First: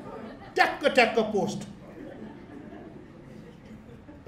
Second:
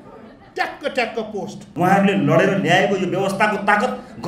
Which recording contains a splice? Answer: second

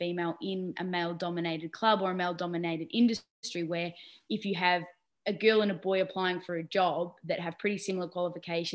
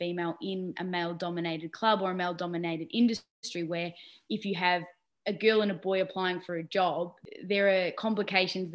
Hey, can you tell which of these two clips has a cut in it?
second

